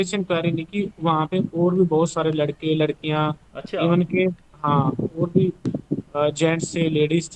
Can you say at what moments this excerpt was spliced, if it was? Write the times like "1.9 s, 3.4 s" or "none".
none